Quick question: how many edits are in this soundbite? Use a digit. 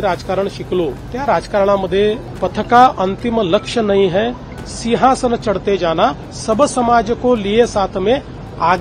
3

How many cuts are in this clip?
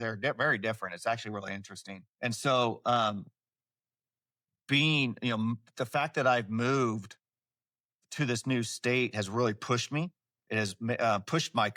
0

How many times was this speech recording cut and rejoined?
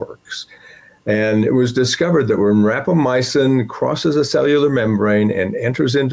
0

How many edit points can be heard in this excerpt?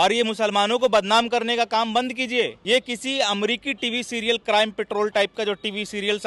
1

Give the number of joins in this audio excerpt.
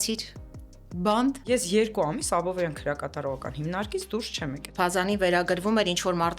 2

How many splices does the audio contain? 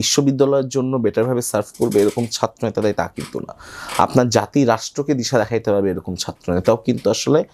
0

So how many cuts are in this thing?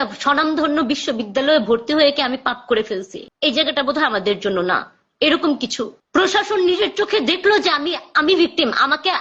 0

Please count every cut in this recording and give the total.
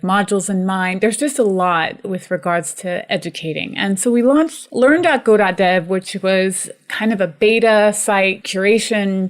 2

